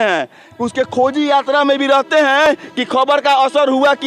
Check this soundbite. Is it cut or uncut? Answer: uncut